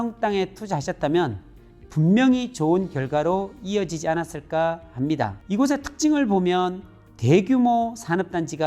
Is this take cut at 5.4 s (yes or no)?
yes